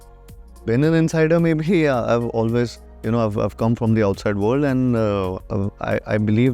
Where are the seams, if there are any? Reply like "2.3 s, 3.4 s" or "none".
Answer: 5.4 s